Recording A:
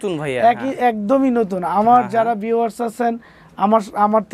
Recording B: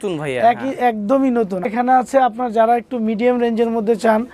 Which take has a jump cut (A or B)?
B